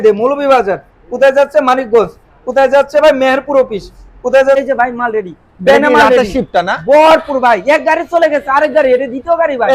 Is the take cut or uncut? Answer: cut